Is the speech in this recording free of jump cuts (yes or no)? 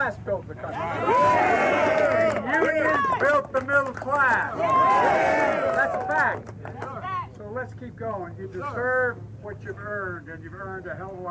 yes